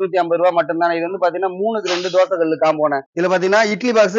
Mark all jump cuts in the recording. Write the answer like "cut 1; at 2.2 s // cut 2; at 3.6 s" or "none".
cut 1; at 3.1 s